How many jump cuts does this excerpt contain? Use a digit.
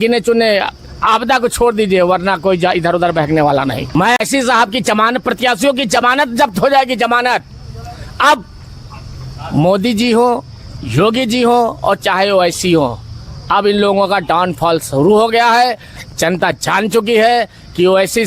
1